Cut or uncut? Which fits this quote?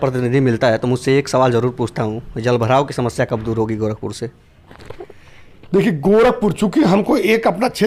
uncut